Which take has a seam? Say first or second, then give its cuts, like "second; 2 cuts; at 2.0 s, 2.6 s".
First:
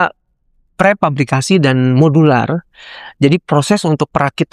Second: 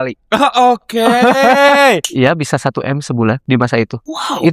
second; 2 cuts; at 2.1 s, 3.6 s